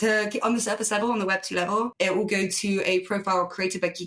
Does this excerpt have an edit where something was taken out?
yes; 1 cut; at 1.9 s

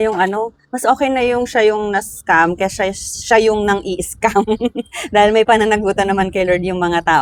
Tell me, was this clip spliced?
no; 0 cuts

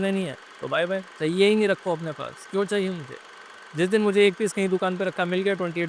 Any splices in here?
no; 0 cuts

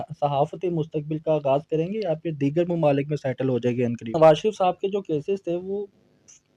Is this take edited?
yes; 1 cut; at 4.1 s

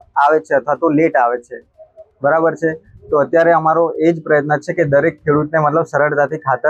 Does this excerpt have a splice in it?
no; 0 cuts

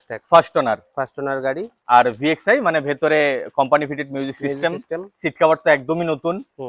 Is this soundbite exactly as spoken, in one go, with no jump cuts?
yes; 0 cuts

